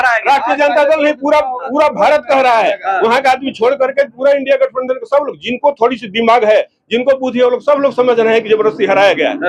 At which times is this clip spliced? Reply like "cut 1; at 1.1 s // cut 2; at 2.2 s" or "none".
none